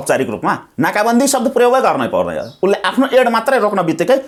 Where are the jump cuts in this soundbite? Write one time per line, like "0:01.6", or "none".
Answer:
none